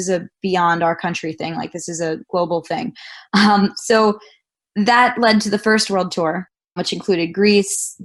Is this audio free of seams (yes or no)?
yes